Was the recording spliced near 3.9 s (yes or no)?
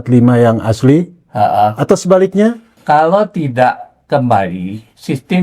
no